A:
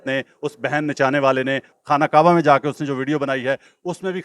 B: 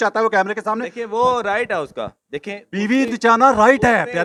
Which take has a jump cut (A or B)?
A